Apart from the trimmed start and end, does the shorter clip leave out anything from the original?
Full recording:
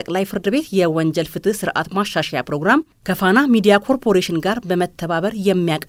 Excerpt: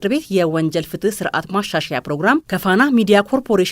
yes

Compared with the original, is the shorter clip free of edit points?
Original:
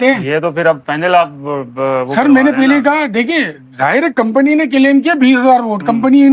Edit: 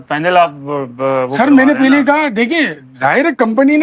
yes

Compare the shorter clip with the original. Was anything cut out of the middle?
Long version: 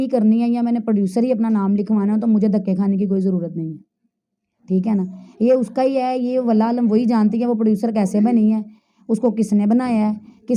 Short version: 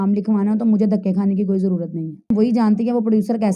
yes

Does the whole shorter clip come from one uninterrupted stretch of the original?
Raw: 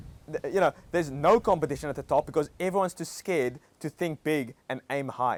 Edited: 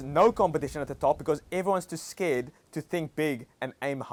yes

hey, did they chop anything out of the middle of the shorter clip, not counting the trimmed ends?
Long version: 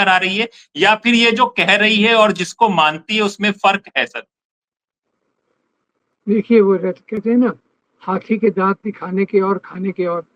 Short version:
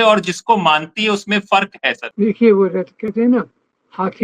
yes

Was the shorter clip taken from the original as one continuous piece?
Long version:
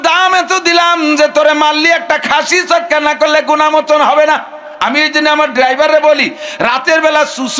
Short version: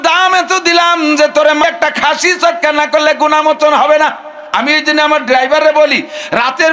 no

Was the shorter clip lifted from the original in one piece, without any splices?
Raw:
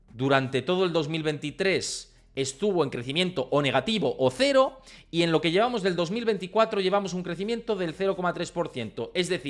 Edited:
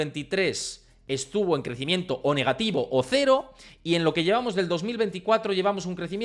yes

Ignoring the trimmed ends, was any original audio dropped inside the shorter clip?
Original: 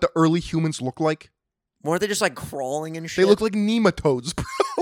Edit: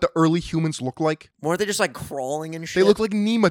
yes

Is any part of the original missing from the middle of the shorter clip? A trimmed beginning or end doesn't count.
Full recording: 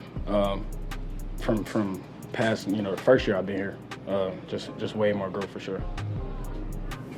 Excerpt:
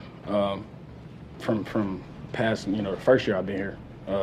no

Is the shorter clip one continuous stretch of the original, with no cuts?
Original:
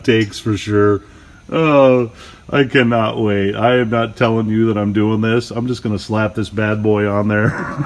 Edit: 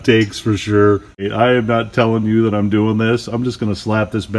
no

